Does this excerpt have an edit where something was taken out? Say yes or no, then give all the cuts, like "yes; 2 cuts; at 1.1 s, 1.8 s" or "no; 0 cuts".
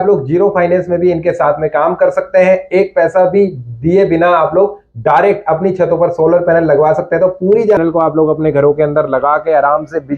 yes; 1 cut; at 7.8 s